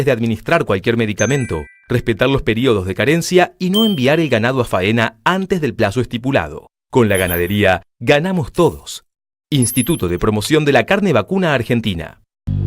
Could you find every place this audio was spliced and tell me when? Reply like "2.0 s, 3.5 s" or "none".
11.8 s